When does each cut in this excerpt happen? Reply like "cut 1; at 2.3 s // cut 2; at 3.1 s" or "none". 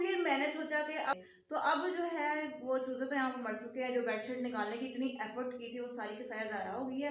cut 1; at 1.1 s